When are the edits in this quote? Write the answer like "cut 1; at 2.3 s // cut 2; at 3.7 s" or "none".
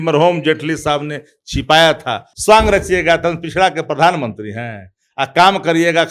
cut 1; at 2.3 s